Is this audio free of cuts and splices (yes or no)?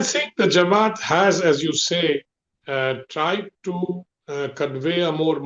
yes